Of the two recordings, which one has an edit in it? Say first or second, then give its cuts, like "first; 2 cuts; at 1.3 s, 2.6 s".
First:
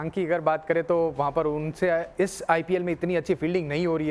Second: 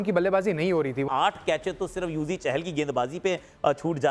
second; 1 cut; at 1.1 s